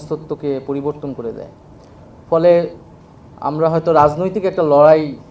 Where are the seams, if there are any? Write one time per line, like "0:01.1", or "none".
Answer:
none